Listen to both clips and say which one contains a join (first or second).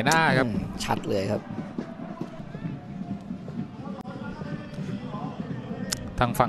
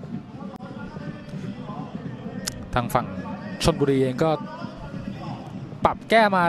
first